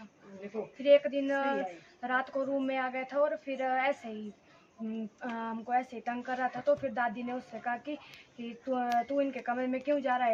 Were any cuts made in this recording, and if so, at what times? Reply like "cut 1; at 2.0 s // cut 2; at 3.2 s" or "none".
none

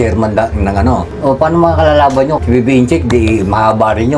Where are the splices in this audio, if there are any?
cut 1; at 1.1 s // cut 2; at 2.4 s

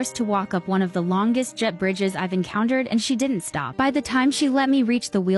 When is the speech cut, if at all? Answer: cut 1; at 3.6 s

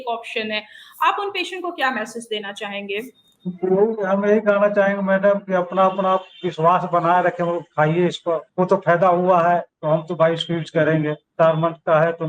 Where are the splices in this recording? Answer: cut 1; at 8.5 s // cut 2; at 9.7 s // cut 3; at 11.2 s

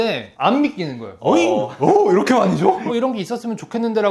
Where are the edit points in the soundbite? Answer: cut 1; at 2.8 s

